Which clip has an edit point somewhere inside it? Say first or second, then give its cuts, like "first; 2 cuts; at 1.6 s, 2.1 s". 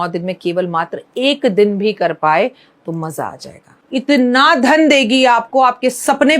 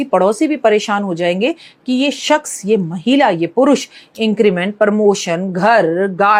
first; 1 cut; at 3.9 s